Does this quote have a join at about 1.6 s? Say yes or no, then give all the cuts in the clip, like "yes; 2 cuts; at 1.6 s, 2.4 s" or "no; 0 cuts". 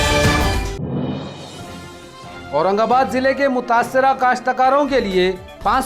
yes; 1 cut; at 1.6 s